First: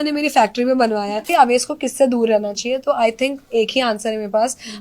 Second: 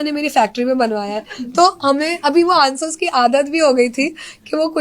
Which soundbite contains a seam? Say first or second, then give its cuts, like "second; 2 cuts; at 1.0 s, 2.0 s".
first; 1 cut; at 1.3 s